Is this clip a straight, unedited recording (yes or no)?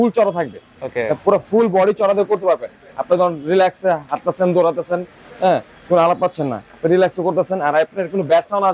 yes